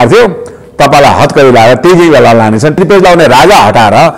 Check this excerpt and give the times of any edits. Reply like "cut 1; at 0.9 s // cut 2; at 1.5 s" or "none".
cut 1; at 2.7 s